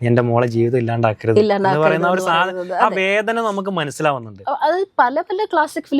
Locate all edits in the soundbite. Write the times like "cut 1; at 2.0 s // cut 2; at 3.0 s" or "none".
none

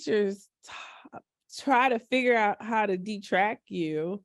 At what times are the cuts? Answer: none

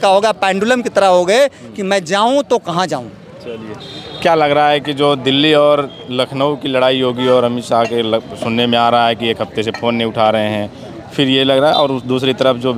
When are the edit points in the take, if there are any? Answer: none

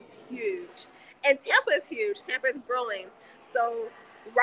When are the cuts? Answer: none

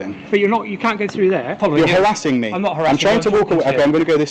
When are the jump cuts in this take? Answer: cut 1; at 1.6 s

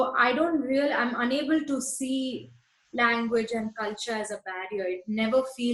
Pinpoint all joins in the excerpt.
none

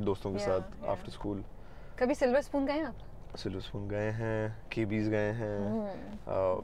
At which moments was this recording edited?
none

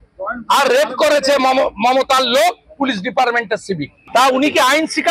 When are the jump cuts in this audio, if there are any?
cut 1; at 3.9 s

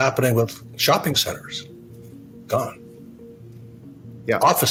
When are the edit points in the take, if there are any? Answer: none

